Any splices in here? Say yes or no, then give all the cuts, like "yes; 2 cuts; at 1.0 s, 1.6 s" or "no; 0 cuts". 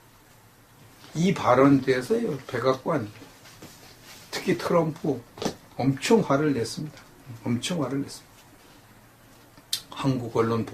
yes; 1 cut; at 4.9 s